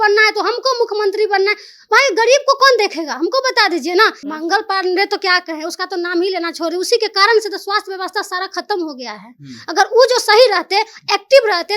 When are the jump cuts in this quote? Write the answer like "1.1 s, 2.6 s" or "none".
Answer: 4.2 s